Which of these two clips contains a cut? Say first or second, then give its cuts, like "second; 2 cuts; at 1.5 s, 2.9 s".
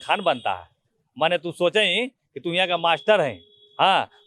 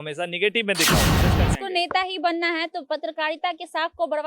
second; 1 cut; at 1.2 s